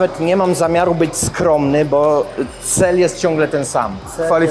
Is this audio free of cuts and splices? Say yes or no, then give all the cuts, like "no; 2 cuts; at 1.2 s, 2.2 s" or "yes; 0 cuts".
yes; 0 cuts